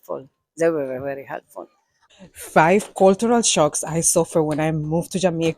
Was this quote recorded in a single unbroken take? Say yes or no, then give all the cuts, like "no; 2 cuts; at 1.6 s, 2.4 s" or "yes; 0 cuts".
no; 1 cut; at 2.2 s